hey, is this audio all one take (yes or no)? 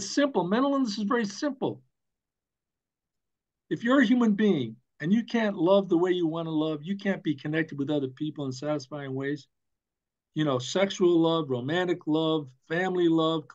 yes